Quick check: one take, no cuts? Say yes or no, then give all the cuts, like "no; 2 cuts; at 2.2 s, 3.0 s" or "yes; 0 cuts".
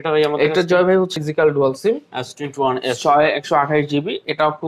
no; 1 cut; at 1.1 s